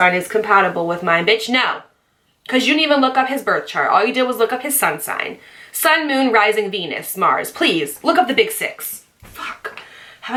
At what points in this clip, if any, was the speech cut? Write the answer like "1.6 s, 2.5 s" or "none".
none